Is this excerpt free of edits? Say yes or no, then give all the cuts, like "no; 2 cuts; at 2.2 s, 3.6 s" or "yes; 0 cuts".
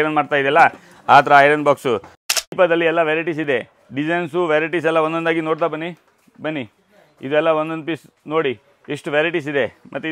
no; 1 cut; at 2.2 s